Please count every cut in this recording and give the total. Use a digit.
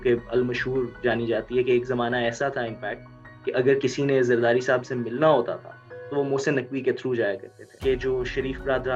1